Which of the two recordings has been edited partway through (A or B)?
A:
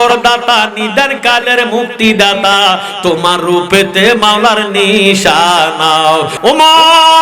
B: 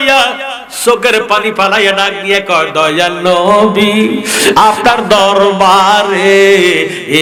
A